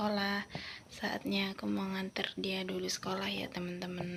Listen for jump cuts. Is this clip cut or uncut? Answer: uncut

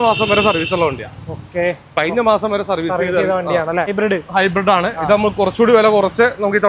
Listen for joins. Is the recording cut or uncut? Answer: cut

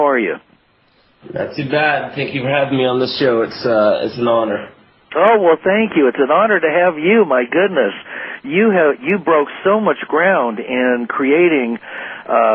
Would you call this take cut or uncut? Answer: uncut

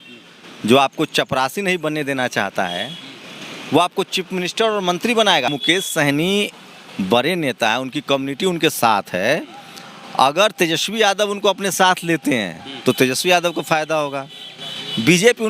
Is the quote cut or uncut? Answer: cut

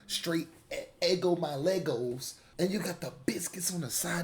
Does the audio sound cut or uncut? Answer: cut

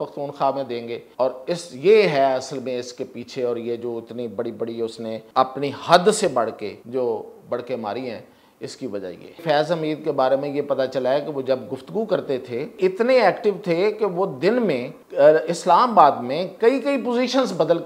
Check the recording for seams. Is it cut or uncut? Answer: cut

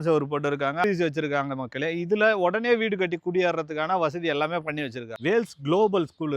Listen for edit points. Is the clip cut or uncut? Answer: cut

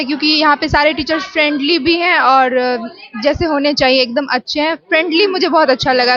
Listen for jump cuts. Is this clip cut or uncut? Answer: uncut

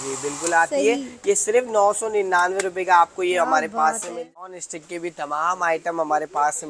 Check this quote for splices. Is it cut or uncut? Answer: cut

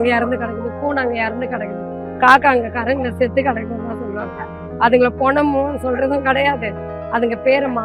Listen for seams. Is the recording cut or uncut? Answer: uncut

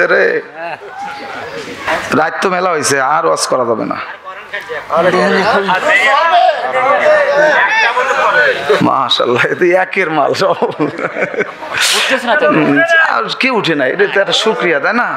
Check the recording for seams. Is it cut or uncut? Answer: cut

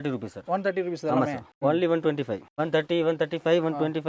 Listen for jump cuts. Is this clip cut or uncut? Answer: cut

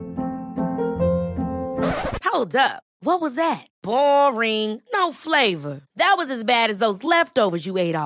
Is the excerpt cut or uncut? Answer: uncut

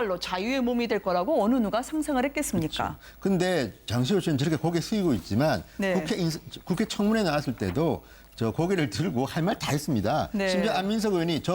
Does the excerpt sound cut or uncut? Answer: cut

